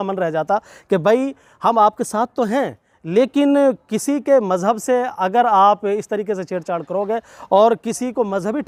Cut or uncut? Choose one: uncut